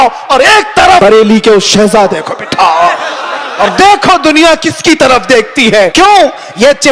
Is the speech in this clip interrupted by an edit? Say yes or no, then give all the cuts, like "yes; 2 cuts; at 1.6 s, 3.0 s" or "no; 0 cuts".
yes; 2 cuts; at 1.0 s, 5.9 s